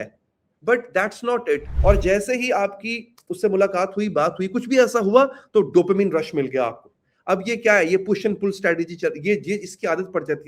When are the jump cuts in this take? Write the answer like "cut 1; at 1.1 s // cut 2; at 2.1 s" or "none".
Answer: cut 1; at 1.7 s